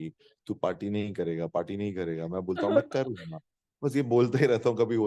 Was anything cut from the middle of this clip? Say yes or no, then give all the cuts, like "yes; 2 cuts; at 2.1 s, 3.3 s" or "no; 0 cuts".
no; 0 cuts